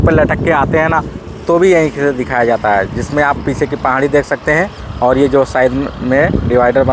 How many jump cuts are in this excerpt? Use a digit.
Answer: 0